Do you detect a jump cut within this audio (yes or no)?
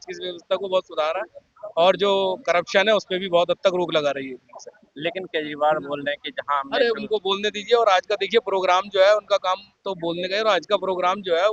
no